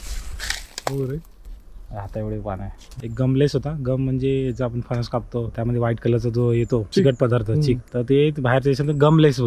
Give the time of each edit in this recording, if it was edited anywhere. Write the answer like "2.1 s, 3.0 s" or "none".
2.9 s